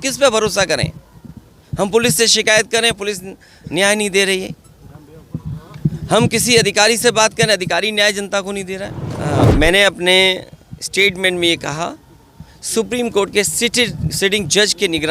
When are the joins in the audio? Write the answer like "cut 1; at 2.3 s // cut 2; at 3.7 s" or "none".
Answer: cut 1; at 9.3 s